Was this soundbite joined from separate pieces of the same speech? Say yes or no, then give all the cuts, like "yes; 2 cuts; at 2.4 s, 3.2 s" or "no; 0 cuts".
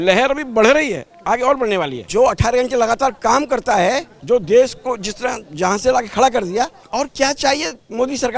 yes; 3 cuts; at 2.1 s, 4.1 s, 6.8 s